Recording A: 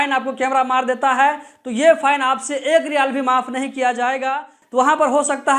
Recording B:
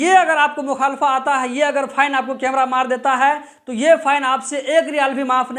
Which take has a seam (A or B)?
A